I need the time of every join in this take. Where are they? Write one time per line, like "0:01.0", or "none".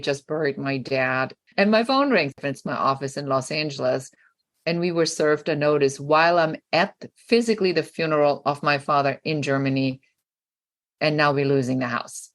0:01.4
0:02.3